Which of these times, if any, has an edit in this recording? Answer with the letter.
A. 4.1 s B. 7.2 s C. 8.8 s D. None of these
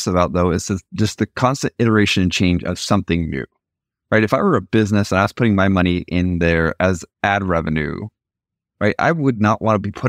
D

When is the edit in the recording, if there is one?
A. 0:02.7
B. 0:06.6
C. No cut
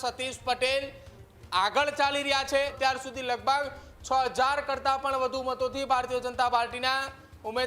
A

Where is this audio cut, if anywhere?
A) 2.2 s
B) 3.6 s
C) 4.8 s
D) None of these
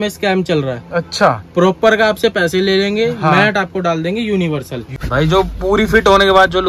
C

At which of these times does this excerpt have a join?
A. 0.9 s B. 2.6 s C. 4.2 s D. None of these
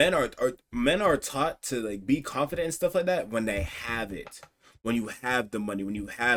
D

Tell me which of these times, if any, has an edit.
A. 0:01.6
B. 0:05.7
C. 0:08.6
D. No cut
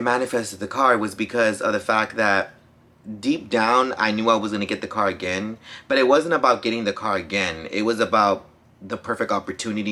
D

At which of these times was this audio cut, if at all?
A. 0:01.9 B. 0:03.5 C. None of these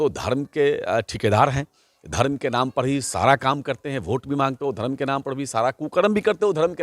C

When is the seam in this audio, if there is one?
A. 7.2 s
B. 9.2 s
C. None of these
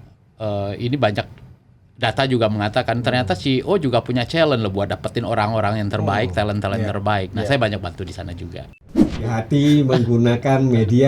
B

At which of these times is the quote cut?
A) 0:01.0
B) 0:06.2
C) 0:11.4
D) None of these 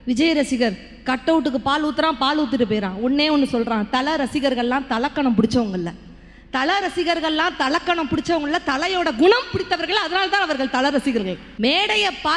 C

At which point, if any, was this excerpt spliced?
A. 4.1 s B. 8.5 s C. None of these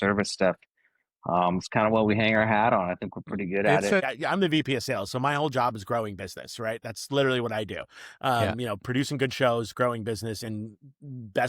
A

